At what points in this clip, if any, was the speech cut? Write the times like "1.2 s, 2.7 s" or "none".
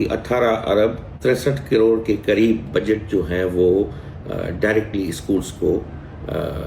1.1 s